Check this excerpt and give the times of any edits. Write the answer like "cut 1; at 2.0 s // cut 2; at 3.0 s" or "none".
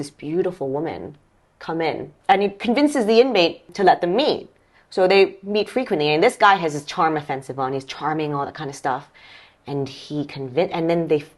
cut 1; at 2.1 s // cut 2; at 3.7 s